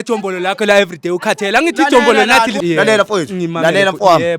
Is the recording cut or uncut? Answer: cut